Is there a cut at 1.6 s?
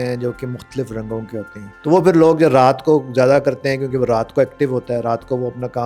yes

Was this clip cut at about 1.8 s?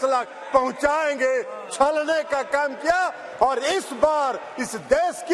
no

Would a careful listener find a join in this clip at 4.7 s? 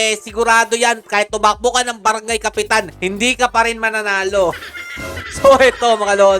no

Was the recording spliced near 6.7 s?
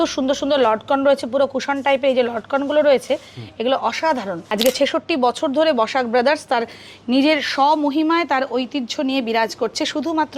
no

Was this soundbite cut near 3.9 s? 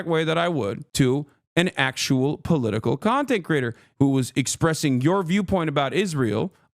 yes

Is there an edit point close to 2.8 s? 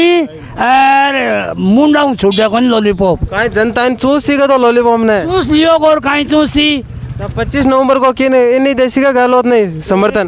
no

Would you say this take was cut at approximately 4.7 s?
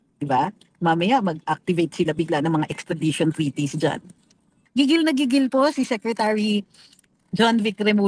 yes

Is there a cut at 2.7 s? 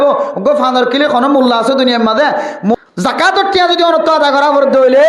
yes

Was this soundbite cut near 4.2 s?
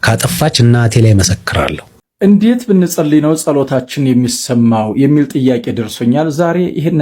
no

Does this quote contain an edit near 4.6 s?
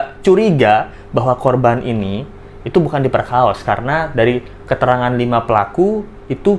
no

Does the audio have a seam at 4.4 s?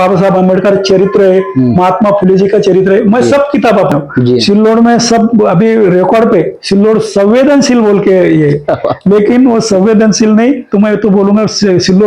yes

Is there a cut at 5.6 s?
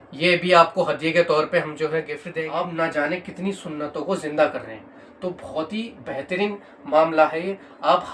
no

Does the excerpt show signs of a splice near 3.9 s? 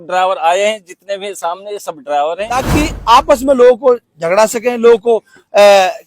no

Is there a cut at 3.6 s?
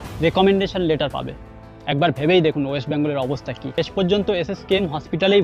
yes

